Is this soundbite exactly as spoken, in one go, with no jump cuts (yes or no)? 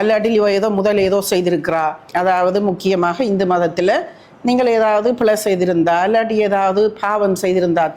no